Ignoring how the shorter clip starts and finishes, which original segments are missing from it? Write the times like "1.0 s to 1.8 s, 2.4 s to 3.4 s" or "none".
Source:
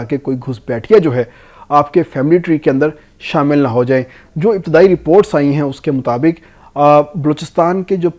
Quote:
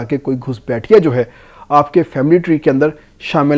none